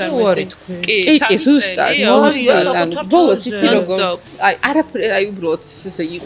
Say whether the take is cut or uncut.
uncut